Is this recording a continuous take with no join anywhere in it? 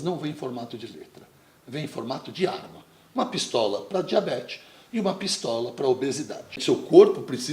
no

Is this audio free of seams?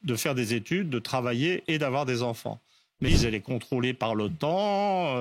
no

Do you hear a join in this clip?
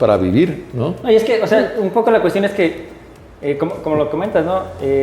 no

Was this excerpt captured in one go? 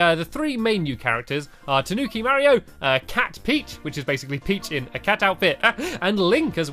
no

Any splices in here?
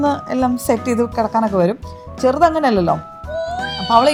no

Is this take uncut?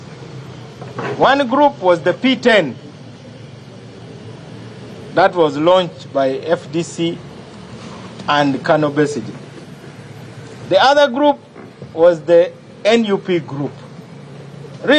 yes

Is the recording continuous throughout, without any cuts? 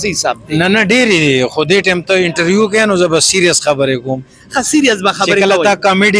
yes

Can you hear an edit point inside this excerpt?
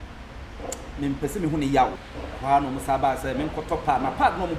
yes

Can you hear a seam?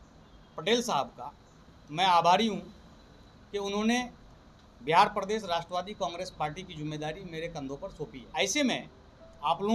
yes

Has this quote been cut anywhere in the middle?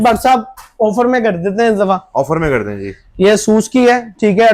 no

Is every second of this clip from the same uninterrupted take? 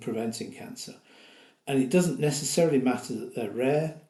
yes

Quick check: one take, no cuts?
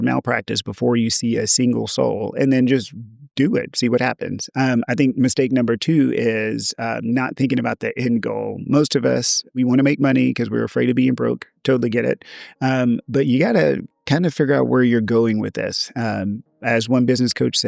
no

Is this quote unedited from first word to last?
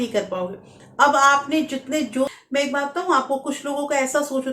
no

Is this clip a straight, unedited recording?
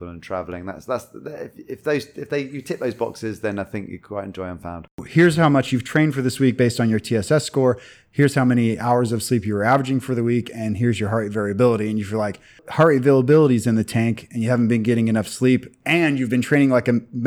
no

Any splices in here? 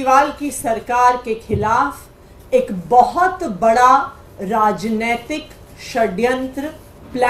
no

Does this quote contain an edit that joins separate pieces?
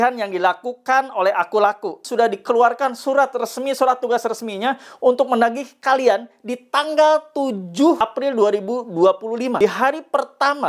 yes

